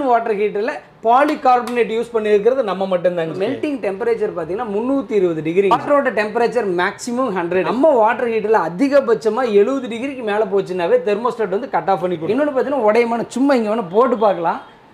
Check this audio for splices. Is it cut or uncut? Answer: cut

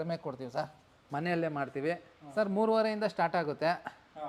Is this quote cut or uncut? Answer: cut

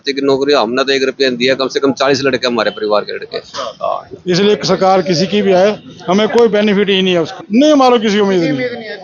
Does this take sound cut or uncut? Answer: cut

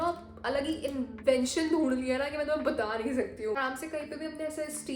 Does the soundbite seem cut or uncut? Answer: cut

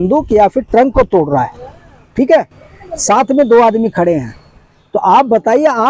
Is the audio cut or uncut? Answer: uncut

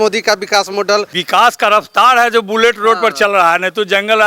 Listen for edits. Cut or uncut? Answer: cut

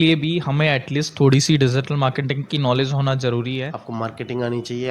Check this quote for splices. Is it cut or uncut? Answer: cut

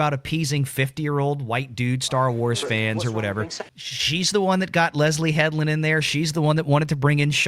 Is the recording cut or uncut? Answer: cut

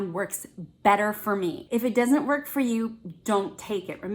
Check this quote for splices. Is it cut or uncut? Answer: cut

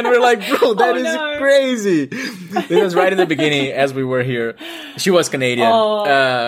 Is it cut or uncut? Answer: uncut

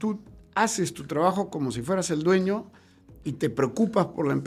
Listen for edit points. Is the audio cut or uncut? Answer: uncut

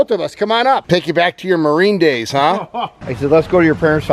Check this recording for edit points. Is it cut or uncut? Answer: cut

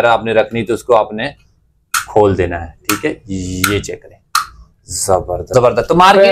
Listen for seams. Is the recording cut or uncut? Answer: cut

